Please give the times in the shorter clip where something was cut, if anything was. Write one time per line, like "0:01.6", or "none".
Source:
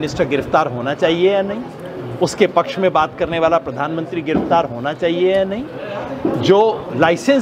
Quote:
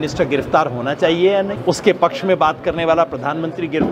0:01.5